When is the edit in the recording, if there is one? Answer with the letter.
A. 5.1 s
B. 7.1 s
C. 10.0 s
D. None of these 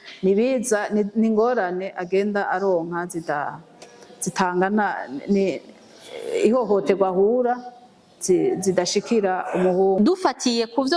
C